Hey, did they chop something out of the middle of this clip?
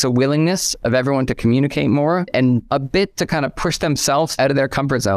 yes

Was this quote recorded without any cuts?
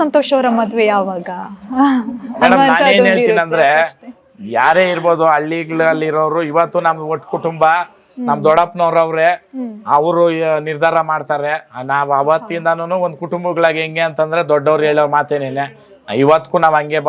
yes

